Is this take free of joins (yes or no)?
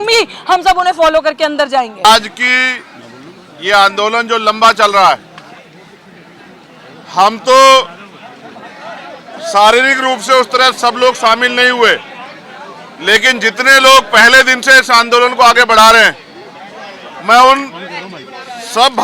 yes